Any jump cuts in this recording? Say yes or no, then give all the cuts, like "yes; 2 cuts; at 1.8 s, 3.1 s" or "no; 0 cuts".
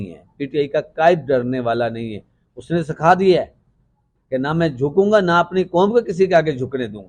no; 0 cuts